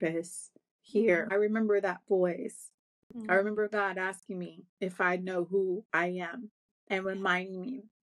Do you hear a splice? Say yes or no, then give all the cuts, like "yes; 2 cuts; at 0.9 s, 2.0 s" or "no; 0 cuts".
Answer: yes; 1 cut; at 1.3 s